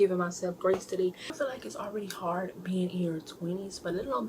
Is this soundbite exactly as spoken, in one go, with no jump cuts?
no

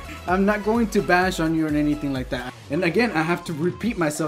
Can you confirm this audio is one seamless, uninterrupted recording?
no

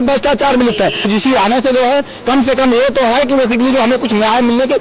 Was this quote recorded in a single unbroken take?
no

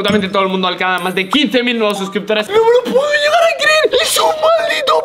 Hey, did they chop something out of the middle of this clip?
yes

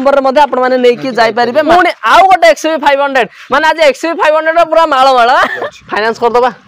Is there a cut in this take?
yes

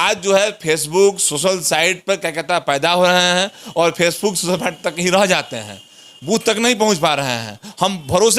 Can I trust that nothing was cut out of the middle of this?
yes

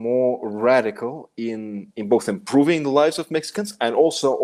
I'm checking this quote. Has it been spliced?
no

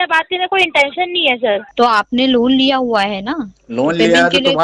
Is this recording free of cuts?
no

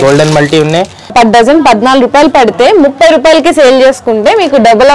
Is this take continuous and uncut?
no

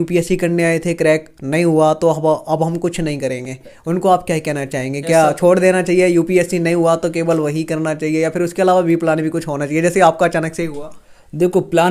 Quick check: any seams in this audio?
no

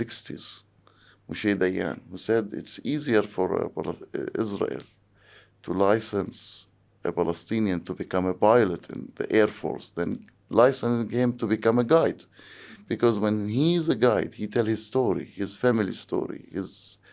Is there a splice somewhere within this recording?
no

